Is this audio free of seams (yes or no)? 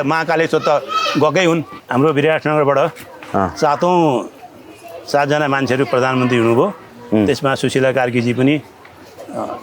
no